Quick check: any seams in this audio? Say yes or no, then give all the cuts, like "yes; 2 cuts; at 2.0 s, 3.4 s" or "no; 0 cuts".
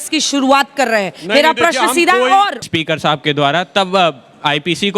yes; 1 cut; at 2.6 s